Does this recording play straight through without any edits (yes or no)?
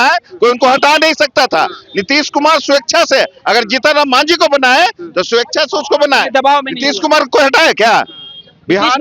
yes